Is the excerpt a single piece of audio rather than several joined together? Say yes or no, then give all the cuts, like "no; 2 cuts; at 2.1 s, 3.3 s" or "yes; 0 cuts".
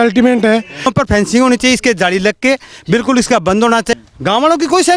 no; 2 cuts; at 0.9 s, 3.9 s